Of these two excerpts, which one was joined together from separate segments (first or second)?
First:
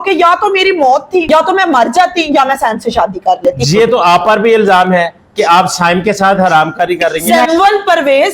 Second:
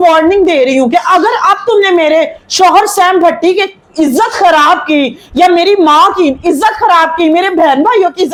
first